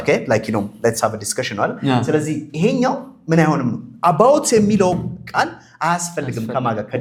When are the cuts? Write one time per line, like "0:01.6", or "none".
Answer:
none